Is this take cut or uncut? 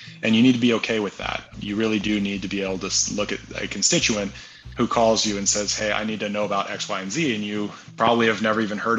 cut